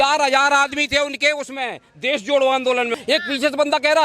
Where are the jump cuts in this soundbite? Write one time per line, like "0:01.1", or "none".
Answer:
0:02.9